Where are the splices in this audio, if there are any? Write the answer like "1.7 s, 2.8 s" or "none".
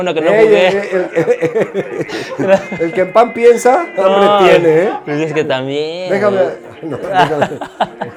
none